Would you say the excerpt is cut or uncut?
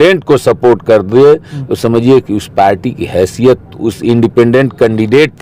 uncut